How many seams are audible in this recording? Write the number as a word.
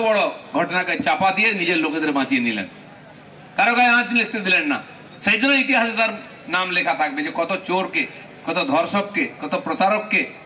zero